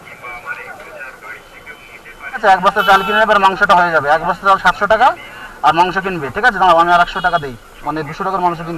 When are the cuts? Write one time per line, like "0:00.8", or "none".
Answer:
0:02.4